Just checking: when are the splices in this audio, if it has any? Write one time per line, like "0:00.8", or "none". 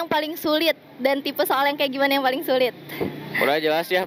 none